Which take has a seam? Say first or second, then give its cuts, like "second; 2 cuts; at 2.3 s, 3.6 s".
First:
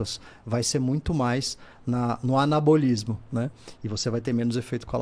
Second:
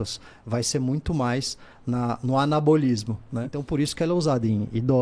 second; 1 cut; at 3.5 s